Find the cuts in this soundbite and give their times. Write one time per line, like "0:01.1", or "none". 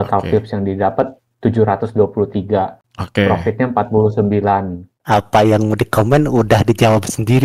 0:04.9